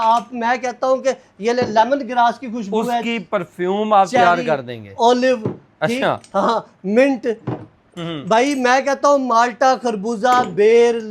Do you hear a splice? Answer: no; 0 cuts

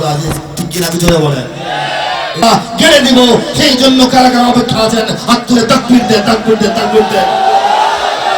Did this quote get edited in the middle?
yes; 1 cut; at 2.4 s

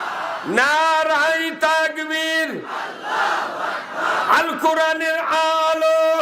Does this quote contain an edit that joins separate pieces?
yes; 1 cut; at 2.8 s

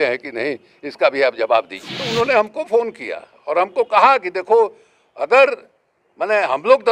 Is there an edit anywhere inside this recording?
yes; 1 cut; at 2.0 s

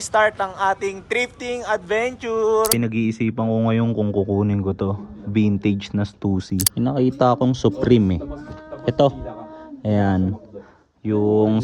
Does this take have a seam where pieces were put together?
yes; 2 cuts; at 2.8 s, 6.7 s

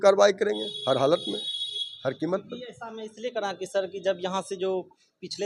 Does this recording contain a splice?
no; 0 cuts

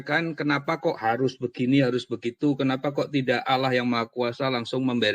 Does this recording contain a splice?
no; 0 cuts

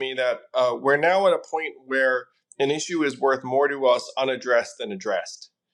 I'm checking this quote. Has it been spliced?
no; 0 cuts

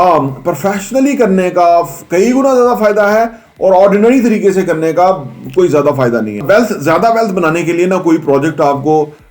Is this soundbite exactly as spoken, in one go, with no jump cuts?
no; 1 cut; at 6.4 s

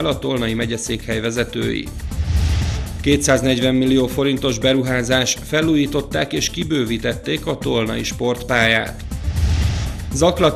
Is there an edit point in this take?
no; 0 cuts

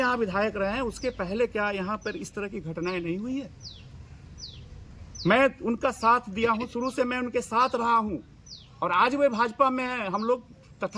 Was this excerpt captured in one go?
yes; 0 cuts

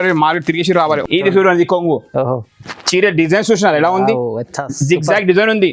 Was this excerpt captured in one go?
no; 1 cut; at 1.0 s

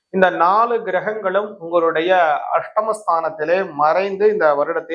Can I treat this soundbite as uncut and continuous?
yes; 0 cuts

